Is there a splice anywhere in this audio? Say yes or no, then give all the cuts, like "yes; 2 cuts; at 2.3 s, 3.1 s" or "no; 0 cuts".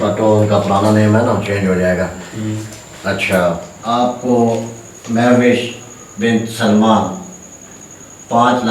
yes; 1 cut; at 3.7 s